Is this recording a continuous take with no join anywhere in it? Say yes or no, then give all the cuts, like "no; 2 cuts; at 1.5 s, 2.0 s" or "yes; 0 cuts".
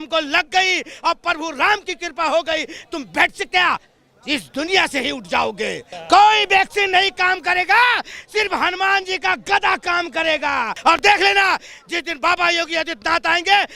no; 2 cuts; at 5.9 s, 10.7 s